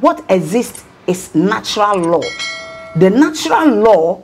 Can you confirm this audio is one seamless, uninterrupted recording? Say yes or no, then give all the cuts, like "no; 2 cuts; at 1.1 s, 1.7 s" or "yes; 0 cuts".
no; 1 cut; at 2.8 s